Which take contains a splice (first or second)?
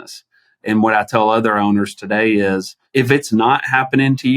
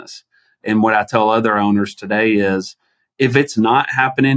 first